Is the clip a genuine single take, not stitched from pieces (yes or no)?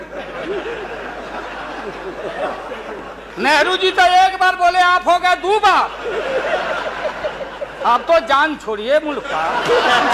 yes